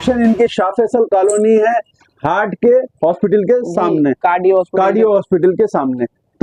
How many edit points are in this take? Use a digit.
0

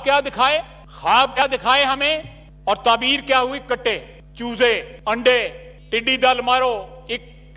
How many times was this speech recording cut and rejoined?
1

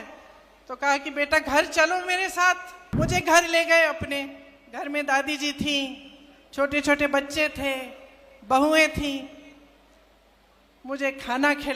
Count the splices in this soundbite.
1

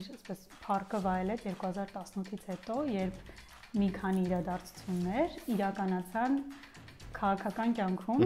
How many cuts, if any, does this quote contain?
0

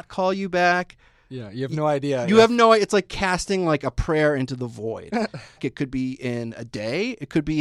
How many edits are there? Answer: 1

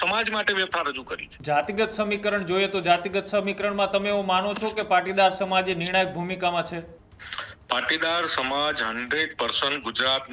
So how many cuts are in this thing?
1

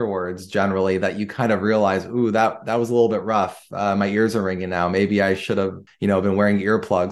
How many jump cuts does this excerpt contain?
1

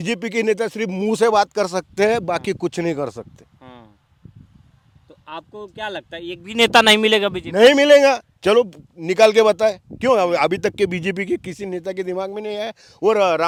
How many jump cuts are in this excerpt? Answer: 0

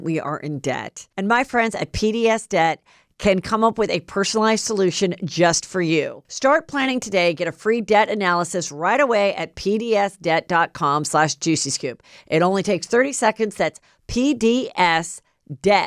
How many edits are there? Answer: 1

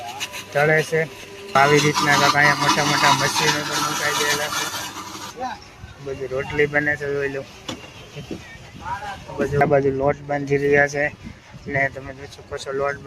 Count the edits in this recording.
3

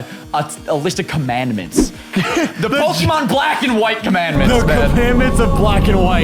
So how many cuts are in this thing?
0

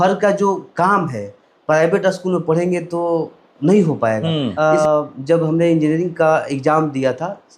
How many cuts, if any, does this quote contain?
1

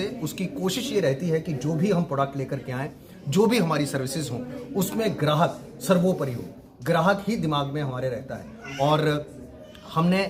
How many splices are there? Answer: 0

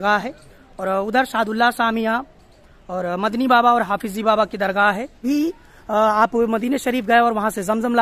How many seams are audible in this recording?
1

